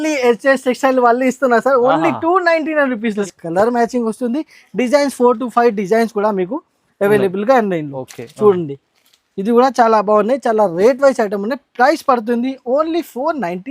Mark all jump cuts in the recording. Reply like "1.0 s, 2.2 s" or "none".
3.2 s